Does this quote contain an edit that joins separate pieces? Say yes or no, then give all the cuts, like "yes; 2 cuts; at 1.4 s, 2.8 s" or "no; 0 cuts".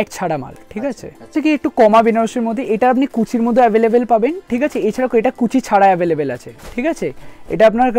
yes; 1 cut; at 1.3 s